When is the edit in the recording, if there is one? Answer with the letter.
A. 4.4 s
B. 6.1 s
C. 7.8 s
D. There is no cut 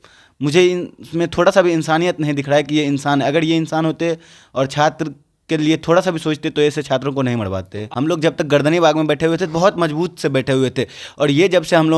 C